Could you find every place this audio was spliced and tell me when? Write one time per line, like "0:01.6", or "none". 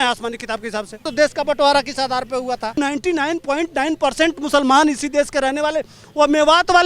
0:01.0
0:02.7

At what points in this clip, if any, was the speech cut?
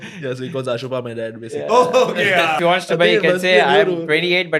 0:02.6

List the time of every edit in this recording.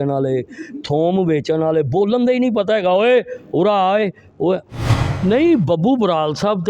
0:04.8

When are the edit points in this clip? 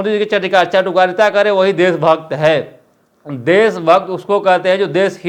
none

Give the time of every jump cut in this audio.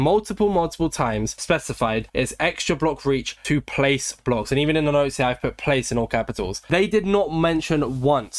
none

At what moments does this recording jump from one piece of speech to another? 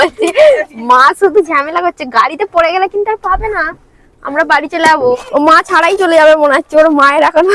0:05.2

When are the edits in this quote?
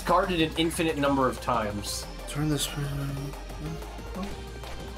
none

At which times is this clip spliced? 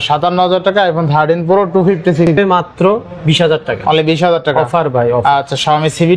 0:02.3

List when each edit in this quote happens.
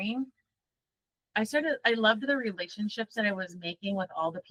none

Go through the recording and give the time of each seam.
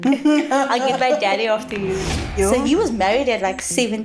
0:02.1

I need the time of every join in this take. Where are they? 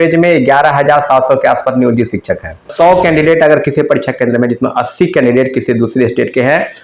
0:02.7

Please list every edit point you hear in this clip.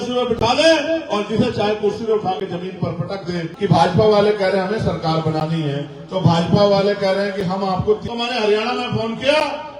0:03.5
0:08.0

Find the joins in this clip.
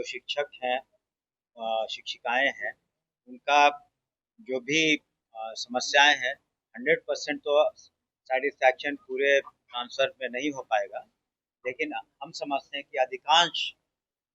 none

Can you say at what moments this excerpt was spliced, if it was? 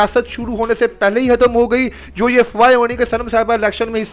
none

